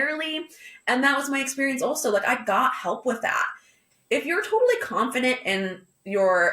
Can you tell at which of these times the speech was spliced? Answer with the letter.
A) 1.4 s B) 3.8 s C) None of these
B